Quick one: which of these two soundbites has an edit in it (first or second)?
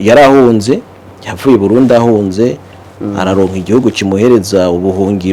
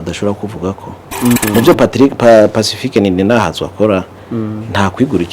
second